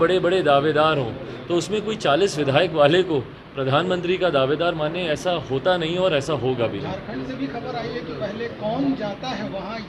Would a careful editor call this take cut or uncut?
uncut